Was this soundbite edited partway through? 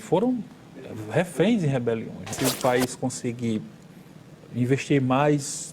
yes; 1 cut; at 2.3 s

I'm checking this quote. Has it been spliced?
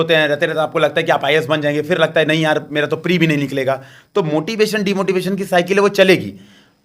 no; 0 cuts

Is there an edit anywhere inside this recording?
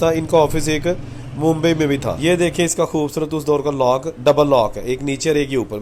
yes; 1 cut; at 2.2 s

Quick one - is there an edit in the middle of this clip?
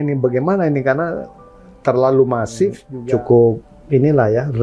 yes; 1 cut; at 2.9 s

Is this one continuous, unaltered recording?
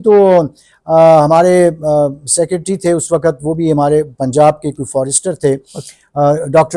yes; 0 cuts

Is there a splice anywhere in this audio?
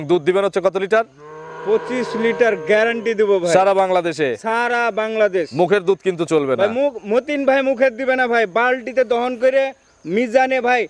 no; 0 cuts

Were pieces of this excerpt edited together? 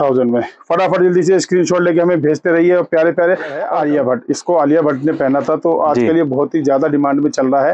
yes; 1 cut; at 3.6 s

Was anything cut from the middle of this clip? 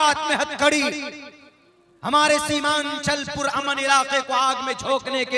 no; 0 cuts

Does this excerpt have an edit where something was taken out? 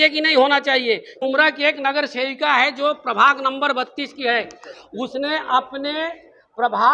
yes; 1 cut; at 1.2 s

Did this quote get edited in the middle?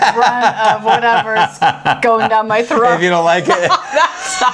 no; 0 cuts

